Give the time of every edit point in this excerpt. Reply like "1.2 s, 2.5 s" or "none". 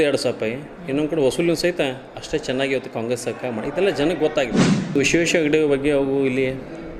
5.0 s